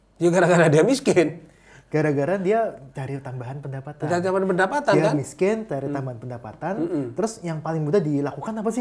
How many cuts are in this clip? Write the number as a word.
zero